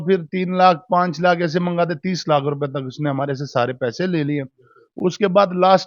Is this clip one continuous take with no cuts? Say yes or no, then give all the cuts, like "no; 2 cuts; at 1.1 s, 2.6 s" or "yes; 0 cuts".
yes; 0 cuts